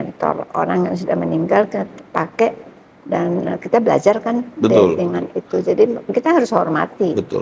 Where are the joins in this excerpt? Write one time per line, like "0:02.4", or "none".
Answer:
none